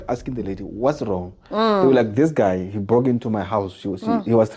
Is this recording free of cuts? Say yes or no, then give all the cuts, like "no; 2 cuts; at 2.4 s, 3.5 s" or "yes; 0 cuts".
yes; 0 cuts